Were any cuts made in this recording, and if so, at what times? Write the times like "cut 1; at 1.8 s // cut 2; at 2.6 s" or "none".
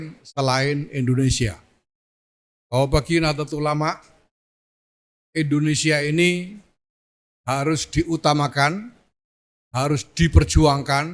none